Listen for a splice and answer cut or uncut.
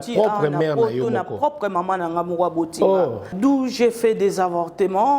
cut